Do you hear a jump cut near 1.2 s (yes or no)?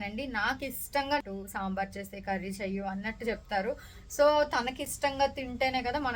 yes